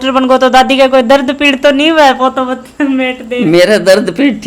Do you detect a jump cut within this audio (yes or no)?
no